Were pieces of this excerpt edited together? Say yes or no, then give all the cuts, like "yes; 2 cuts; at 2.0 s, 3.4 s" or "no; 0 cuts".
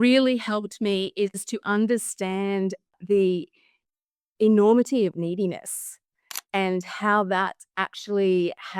yes; 1 cut; at 3.0 s